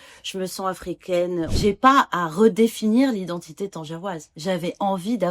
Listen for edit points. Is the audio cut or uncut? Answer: cut